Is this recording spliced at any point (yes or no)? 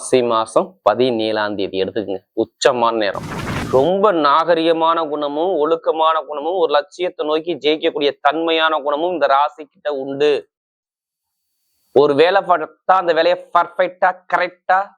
yes